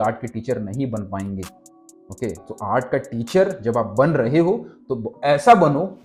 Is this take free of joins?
yes; 0 cuts

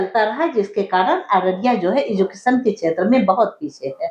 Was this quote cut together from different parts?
no; 0 cuts

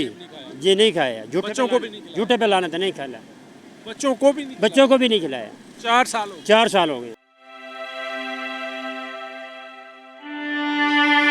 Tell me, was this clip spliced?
no; 0 cuts

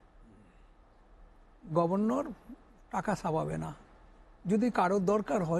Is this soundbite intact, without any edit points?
yes; 0 cuts

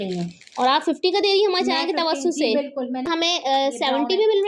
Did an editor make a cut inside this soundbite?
yes; 1 cut; at 3.1 s

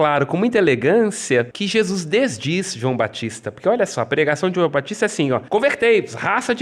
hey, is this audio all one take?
no; 2 cuts; at 1.5 s, 5.4 s

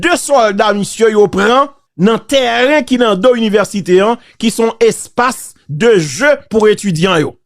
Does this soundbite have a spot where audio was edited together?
yes; 1 cut; at 1.8 s

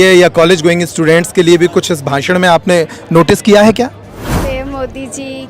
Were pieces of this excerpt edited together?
yes; 1 cut; at 4.4 s

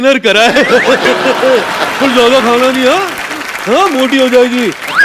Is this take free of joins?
yes; 0 cuts

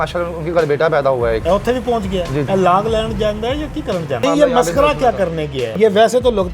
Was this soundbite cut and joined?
yes; 4 cuts; at 1.4 s, 2.5 s, 4.2 s, 5.7 s

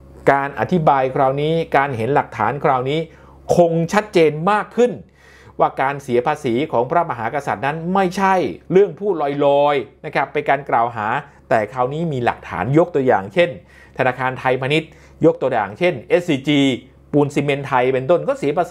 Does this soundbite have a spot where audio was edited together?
no; 0 cuts

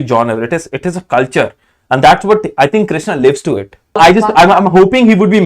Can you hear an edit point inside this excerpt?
yes; 1 cut; at 4.0 s

